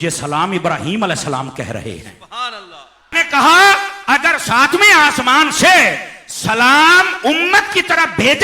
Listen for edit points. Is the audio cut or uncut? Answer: cut